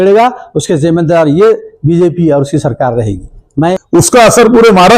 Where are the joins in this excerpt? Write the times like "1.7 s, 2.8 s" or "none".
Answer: 3.8 s